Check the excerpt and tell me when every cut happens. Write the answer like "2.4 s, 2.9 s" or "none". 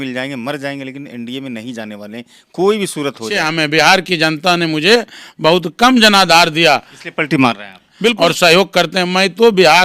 3.4 s, 8.1 s